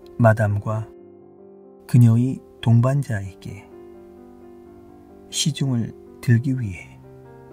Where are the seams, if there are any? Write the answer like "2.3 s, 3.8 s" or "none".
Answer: none